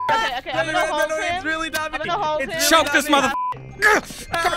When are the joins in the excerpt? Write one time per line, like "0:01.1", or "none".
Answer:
0:03.5